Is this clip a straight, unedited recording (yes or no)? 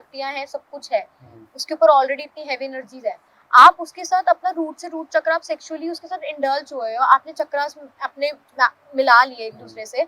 yes